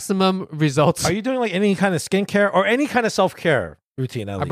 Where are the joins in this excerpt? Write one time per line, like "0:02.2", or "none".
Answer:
none